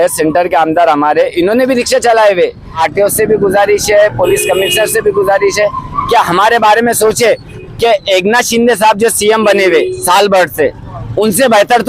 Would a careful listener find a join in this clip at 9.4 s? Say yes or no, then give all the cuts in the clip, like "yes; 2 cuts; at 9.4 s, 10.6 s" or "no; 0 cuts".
no; 2 cuts; at 2.8 s, 7.5 s